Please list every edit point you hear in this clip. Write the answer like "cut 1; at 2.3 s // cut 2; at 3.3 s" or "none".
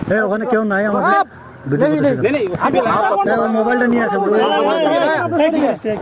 none